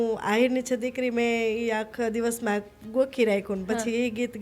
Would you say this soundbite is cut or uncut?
uncut